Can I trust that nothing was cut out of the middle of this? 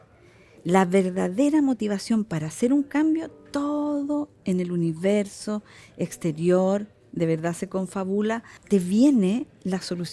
no; 1 cut; at 8.5 s

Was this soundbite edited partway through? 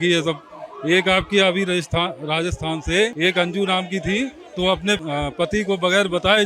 yes; 2 cuts; at 3.1 s, 5.0 s

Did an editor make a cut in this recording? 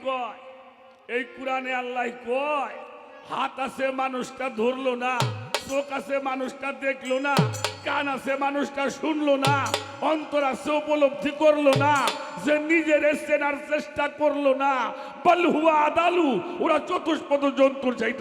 no; 0 cuts

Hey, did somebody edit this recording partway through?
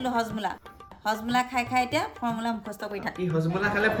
no; 0 cuts

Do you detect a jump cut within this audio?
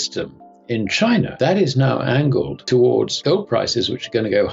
yes; 3 cuts; at 1.3 s, 2.6 s, 3.1 s

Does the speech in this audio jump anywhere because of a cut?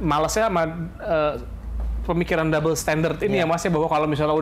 no; 0 cuts

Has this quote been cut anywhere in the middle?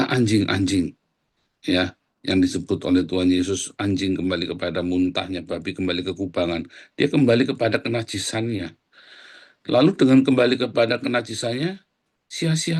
no; 0 cuts

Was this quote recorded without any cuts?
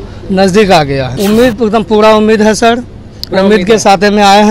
no; 1 cut; at 1.1 s

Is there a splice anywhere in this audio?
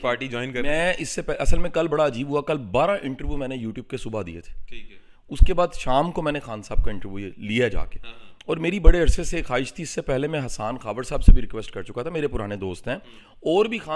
no; 0 cuts

